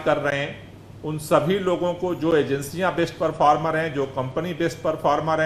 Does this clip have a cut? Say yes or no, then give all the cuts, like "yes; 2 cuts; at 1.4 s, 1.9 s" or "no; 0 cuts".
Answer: no; 0 cuts